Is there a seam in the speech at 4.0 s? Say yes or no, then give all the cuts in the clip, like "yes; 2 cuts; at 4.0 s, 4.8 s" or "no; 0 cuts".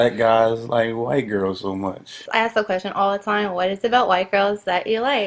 no; 1 cut; at 2.3 s